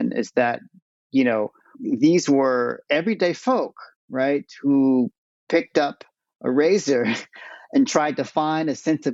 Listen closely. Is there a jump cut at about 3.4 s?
no; 1 cut; at 1.7 s

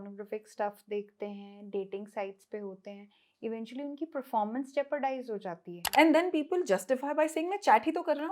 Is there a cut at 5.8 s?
yes; 1 cut; at 5.8 s

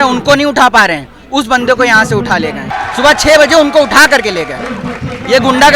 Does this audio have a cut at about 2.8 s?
yes; 1 cut; at 2.8 s

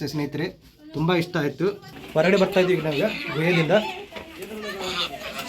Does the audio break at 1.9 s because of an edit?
yes; 1 cut; at 1.9 s

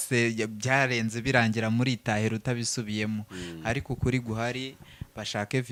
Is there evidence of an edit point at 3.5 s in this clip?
no; 0 cuts

